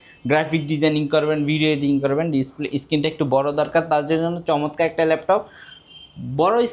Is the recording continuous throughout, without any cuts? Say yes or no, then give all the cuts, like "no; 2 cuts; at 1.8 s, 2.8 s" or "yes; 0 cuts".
yes; 0 cuts